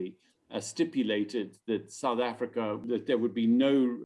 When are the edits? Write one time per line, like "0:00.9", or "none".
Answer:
0:02.8